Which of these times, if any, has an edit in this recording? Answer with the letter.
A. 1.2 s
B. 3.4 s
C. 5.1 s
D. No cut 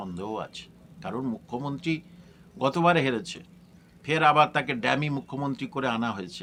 D